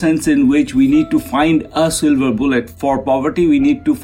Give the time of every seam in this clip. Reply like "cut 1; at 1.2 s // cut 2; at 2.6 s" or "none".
cut 1; at 2.7 s